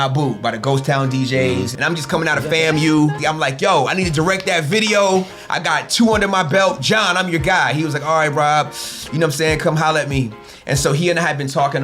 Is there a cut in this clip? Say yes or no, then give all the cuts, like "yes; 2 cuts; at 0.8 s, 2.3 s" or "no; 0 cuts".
yes; 2 cuts; at 1.7 s, 3.2 s